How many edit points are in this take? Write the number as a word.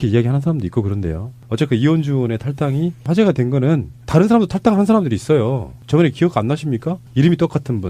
one